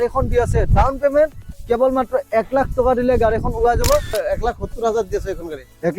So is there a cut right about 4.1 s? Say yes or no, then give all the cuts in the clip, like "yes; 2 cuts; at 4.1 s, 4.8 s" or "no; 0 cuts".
yes; 1 cut; at 4.1 s